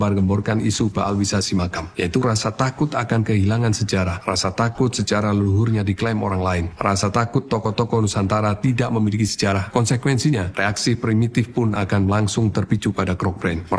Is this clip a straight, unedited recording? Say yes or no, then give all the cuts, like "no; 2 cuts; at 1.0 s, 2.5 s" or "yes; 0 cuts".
yes; 0 cuts